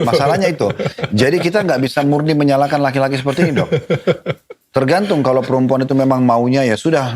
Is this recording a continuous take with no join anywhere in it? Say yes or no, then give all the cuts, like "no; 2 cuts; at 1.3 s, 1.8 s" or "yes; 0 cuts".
yes; 0 cuts